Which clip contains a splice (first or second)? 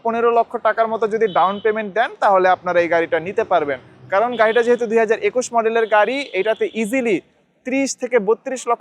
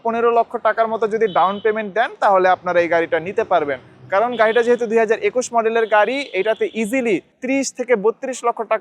second